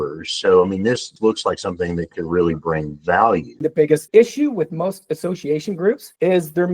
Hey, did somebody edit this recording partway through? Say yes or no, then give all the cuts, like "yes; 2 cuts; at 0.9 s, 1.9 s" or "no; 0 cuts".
yes; 1 cut; at 3.6 s